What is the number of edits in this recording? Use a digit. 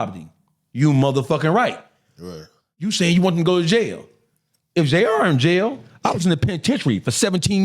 2